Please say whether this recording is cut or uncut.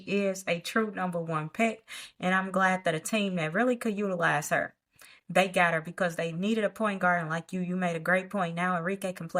uncut